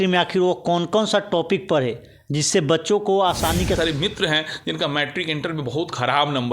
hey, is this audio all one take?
no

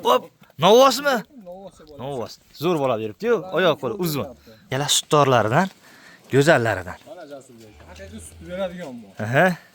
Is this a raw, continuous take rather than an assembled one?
no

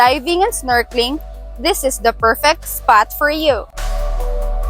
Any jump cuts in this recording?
yes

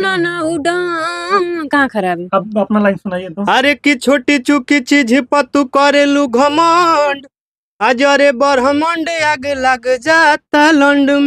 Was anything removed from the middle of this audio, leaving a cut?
no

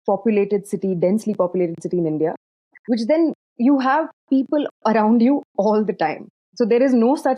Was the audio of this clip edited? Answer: yes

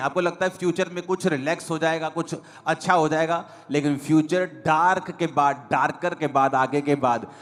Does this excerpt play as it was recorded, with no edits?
yes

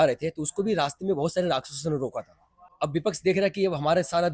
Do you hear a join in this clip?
yes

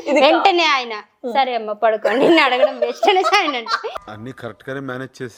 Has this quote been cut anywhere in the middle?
no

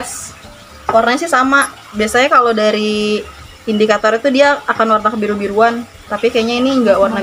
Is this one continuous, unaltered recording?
yes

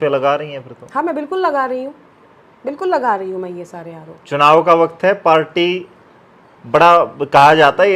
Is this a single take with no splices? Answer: yes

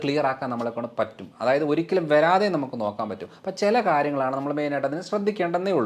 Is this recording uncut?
yes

